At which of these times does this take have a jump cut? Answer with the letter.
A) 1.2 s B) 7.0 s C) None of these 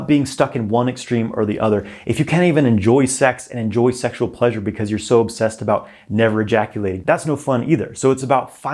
B